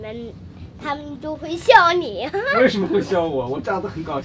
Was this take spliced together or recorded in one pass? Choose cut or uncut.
uncut